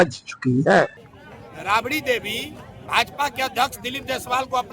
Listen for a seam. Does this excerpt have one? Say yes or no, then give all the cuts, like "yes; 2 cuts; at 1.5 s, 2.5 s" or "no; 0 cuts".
yes; 1 cut; at 1.0 s